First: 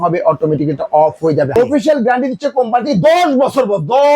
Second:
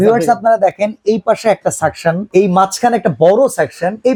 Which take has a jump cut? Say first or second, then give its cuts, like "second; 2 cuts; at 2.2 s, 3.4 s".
first; 1 cut; at 1.6 s